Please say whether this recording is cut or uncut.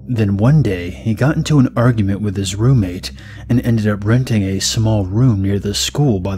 uncut